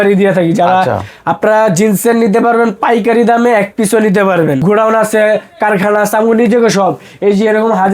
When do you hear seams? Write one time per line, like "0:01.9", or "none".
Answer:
0:04.6

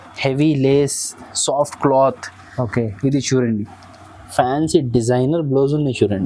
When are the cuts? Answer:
none

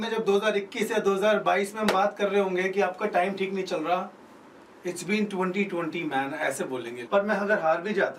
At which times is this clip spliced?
0:07.0

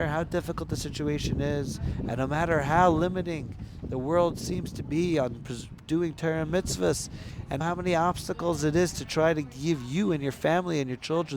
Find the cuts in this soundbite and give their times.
0:07.6

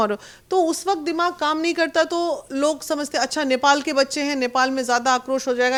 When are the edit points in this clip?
none

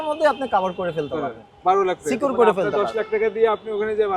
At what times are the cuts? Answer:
none

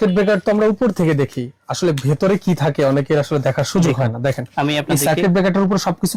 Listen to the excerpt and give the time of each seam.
none

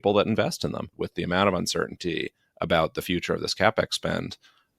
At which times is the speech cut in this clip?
0:01.0

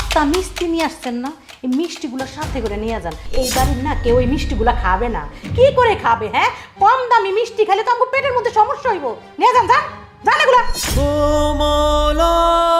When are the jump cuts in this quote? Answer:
none

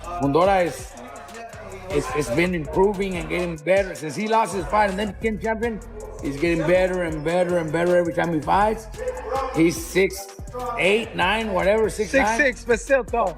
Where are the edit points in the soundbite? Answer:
none

